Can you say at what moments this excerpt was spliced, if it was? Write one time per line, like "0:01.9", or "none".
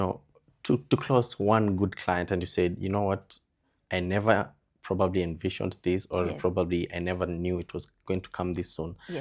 none